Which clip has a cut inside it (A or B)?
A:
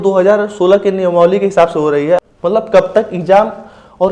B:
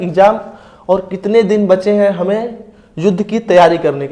A